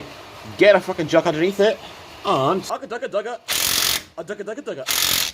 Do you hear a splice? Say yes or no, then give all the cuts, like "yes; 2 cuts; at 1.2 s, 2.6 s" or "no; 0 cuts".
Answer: yes; 1 cut; at 2.7 s